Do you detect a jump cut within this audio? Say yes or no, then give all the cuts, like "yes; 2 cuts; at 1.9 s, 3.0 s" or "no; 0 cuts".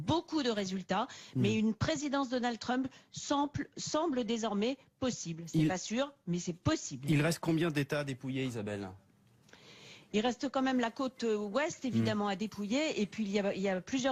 no; 0 cuts